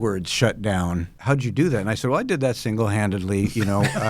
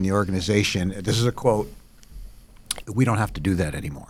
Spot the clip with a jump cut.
first; 1 cut; at 1.1 s

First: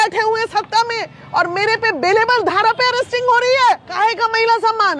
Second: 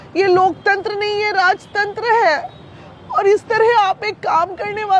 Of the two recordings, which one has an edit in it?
first; 1 cut; at 3.9 s

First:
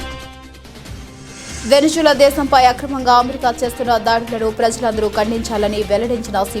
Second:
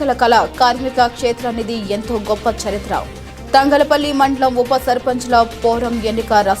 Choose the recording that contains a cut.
first; 1 cut; at 1.0 s

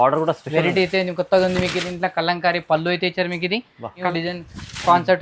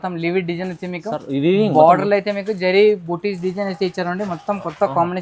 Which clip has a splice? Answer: first; 1 cut; at 4.1 s

